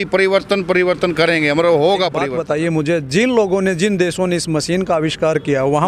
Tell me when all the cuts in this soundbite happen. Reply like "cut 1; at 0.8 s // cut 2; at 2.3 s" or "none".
cut 1; at 2.3 s